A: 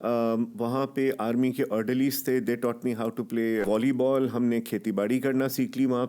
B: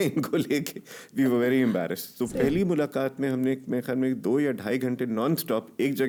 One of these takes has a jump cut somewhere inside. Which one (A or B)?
A